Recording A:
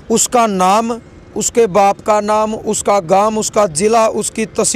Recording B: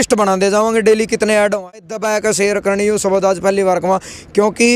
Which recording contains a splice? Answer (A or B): B